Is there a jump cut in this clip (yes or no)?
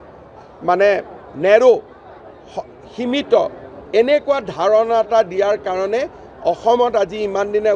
no